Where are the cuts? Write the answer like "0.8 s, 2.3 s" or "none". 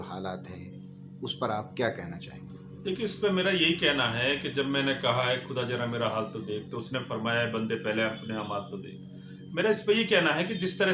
none